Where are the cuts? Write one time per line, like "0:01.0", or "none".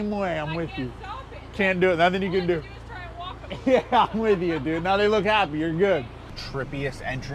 0:06.2